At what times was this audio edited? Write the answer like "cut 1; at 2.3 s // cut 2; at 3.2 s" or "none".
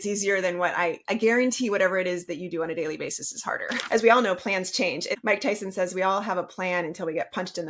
cut 1; at 3.8 s // cut 2; at 5.1 s